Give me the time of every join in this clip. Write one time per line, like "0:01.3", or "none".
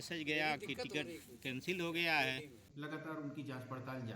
0:02.6